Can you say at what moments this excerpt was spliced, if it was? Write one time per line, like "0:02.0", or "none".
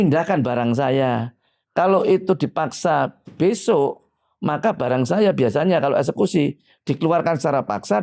none